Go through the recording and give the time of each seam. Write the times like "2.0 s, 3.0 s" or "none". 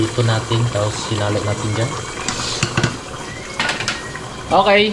none